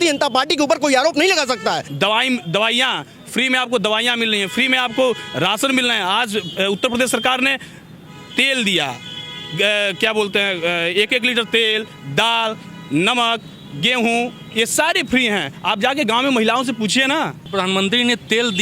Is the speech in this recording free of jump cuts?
no; 2 cuts; at 1.9 s, 17.4 s

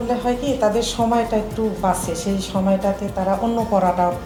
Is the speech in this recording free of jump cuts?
yes; 0 cuts

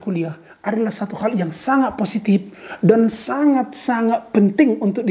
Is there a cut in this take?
no; 0 cuts

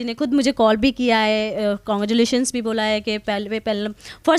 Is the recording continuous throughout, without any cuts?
yes; 0 cuts

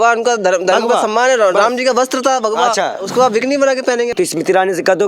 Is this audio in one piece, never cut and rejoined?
no; 2 cuts; at 3.0 s, 4.1 s

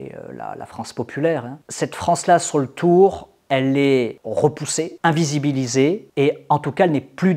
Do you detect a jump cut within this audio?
no; 0 cuts

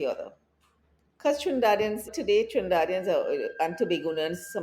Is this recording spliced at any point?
yes; 1 cut; at 2.1 s

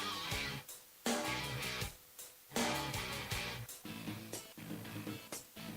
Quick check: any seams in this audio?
yes; 1 cut; at 3.8 s

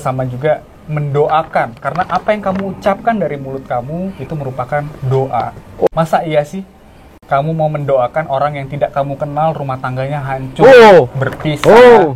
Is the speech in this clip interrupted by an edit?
yes; 1 cut; at 5.9 s

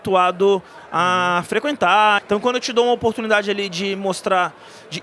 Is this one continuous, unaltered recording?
no; 1 cut; at 2.2 s

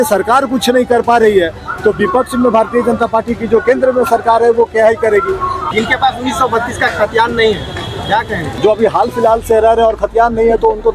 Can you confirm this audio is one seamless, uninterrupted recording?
no; 1 cut; at 5.6 s

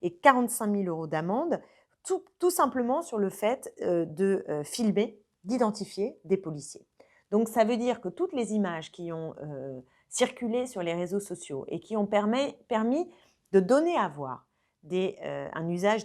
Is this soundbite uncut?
yes; 0 cuts

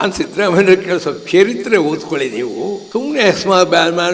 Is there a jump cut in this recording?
yes; 1 cut; at 2.8 s

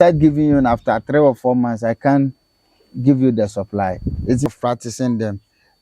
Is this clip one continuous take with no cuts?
no; 1 cut; at 4.5 s

